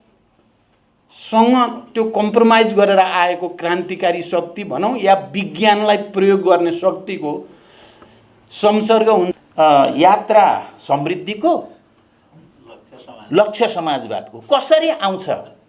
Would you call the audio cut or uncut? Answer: cut